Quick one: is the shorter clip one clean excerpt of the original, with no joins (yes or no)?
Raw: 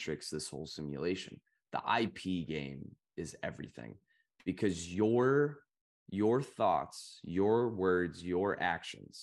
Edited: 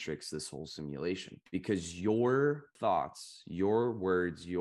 no